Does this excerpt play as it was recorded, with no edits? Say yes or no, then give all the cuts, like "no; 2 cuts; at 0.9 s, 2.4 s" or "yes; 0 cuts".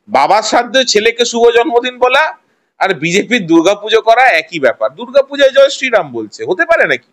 yes; 0 cuts